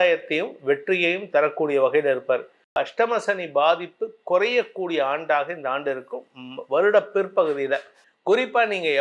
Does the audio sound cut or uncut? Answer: cut